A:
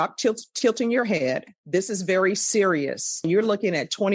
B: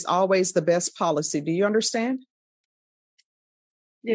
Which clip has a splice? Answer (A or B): A